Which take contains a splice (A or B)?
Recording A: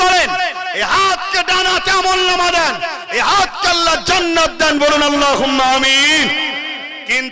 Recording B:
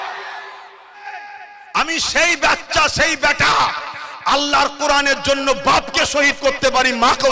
B